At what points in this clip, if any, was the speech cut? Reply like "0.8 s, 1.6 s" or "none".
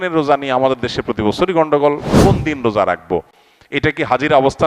2.2 s

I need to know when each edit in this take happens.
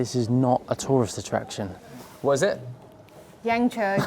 1.8 s

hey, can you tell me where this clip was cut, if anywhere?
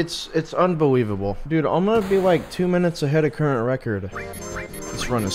1.4 s, 4.1 s

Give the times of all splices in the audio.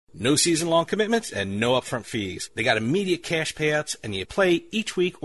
none

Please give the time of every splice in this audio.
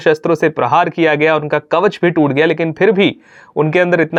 none

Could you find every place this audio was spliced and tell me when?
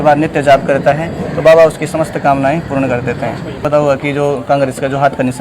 3.6 s

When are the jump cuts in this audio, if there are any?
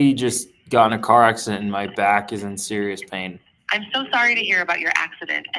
3.5 s

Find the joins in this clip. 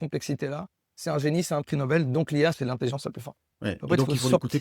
none

